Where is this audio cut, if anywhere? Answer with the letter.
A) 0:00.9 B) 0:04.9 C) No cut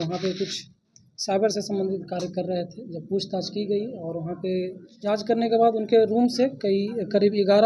B